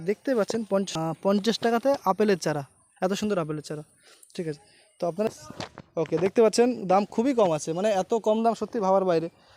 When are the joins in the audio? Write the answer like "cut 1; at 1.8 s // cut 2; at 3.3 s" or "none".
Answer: cut 1; at 0.9 s // cut 2; at 5.3 s